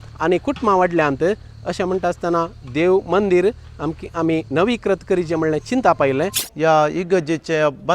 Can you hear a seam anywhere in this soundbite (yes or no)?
yes